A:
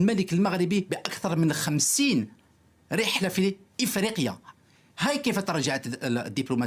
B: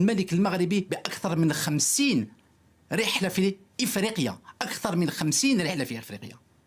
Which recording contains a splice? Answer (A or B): A